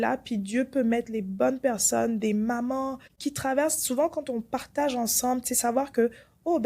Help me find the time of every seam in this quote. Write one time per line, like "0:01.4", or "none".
0:03.2